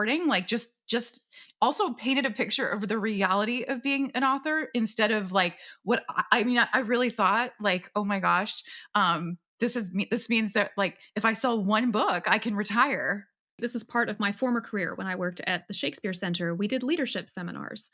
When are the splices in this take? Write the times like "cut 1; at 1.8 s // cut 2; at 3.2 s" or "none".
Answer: cut 1; at 13.6 s